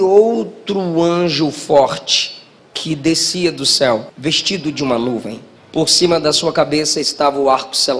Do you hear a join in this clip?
no; 0 cuts

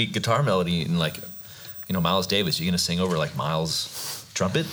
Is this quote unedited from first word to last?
no; 1 cut; at 1.3 s

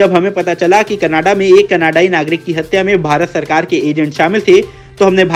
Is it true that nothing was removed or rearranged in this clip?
yes; 0 cuts

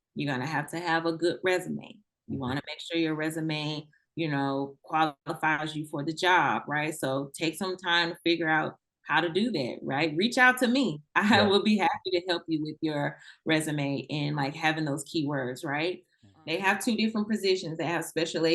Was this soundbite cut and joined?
yes; 1 cut; at 16.2 s

